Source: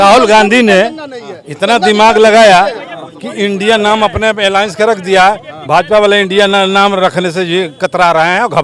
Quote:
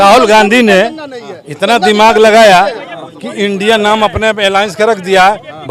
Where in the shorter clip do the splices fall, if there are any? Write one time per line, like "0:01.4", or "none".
none